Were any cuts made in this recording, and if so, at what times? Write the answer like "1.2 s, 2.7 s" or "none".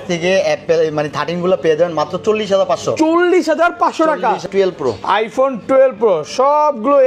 4.4 s